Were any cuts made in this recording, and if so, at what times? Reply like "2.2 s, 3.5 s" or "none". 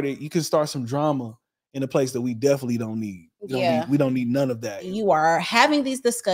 4.8 s